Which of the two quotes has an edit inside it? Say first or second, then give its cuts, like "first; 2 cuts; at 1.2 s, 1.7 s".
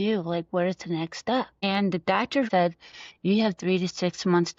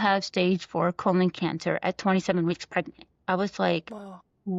first; 2 cuts; at 1.5 s, 2.5 s